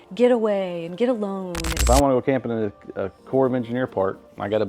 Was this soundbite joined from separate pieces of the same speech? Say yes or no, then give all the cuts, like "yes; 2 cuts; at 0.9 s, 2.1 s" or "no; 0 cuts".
yes; 1 cut; at 1.8 s